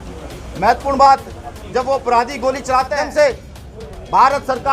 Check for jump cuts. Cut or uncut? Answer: cut